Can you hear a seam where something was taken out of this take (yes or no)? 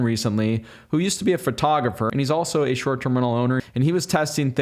yes